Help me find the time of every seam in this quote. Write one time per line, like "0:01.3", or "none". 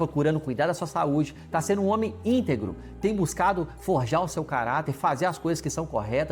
none